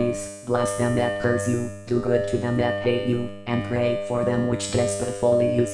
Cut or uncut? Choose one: uncut